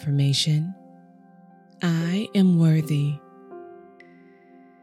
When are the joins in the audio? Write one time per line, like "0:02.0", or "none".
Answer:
0:03.4